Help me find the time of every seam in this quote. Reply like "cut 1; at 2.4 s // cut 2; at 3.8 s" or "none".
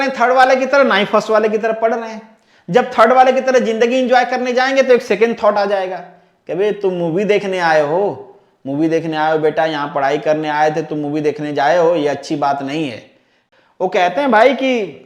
cut 1; at 13.4 s